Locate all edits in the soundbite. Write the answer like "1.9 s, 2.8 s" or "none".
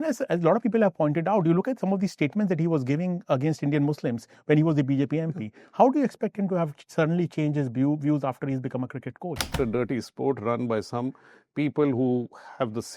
9.6 s